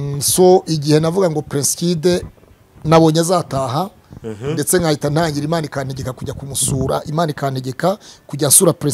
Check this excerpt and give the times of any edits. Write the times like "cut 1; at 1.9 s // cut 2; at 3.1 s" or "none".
none